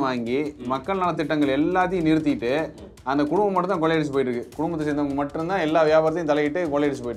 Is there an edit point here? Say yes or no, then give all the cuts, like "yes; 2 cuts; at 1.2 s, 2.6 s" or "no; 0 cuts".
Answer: no; 0 cuts